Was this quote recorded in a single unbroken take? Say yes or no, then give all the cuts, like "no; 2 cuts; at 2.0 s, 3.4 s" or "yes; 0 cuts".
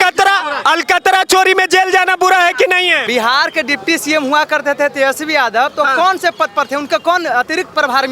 no; 1 cut; at 3.0 s